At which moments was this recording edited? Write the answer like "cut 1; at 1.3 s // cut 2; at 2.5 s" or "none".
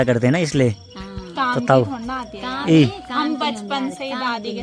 none